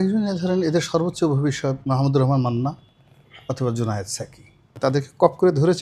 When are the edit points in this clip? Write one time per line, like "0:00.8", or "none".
0:04.6

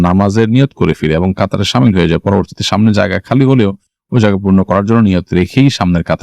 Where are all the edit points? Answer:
none

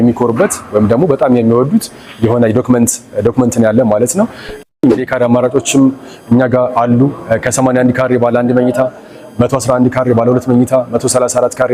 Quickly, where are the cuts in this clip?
0:04.7

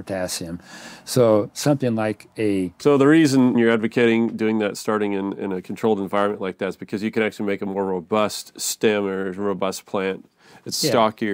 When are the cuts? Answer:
0:02.7
0:03.6

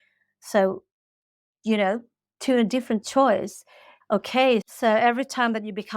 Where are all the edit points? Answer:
0:04.7

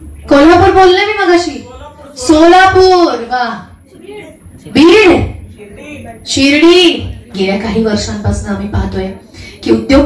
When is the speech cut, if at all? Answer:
0:07.3

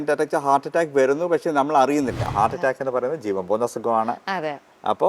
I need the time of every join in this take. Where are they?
0:02.3

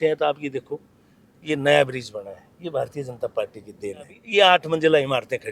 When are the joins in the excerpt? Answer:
0:04.2

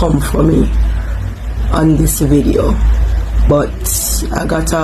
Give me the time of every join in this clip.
0:03.5

